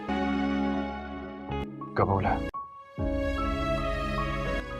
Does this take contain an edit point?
no; 0 cuts

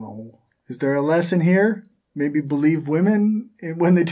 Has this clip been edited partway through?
no; 0 cuts

